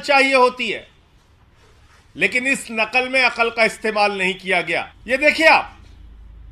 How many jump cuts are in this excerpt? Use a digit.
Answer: 1